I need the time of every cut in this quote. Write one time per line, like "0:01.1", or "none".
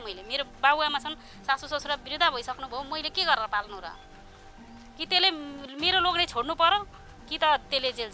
none

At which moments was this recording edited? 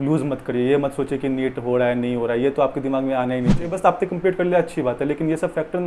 0:03.7

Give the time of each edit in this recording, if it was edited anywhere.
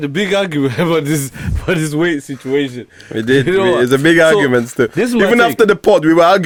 none

